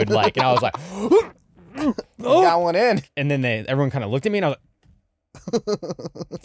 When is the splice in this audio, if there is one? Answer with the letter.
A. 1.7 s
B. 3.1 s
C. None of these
B